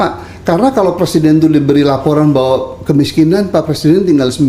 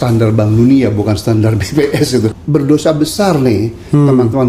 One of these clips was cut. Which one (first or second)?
second